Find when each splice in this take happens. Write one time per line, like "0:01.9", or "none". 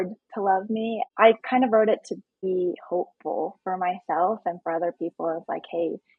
0:01.0
0:02.4

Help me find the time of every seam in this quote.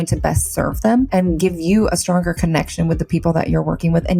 0:01.1

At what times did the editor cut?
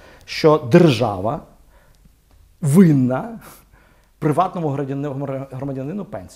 none

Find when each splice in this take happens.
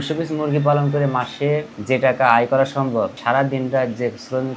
0:01.7
0:03.2

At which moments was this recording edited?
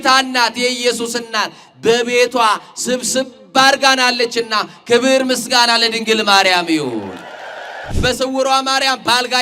0:07.9

